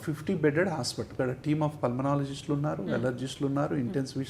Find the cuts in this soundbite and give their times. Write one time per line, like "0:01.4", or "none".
0:01.1

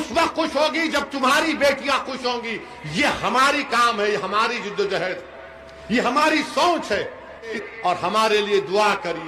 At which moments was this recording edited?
0:07.7

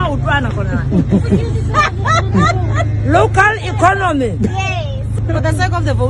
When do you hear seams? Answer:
0:05.2

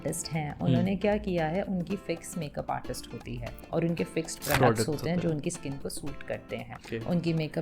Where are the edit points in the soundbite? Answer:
0:03.6
0:06.7

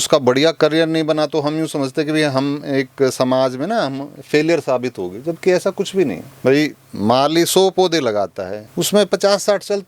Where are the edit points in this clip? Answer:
none

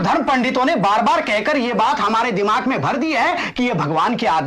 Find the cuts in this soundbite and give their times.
none

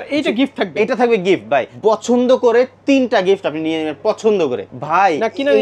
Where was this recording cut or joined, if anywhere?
0:01.7
0:04.7

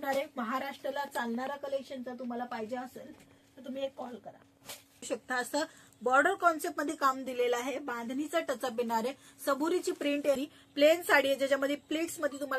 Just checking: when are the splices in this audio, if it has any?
0:05.0
0:10.4

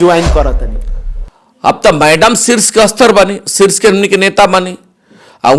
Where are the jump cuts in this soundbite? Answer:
none

